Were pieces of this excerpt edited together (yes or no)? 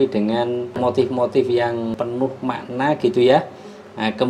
yes